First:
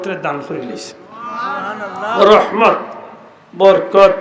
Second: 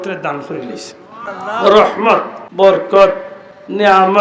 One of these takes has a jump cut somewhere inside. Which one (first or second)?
second